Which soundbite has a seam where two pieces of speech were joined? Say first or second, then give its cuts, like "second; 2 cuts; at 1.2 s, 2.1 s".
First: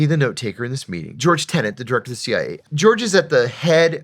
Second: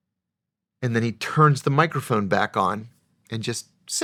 first; 1 cut; at 2.6 s